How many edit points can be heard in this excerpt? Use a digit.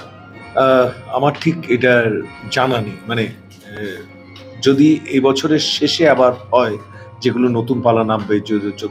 0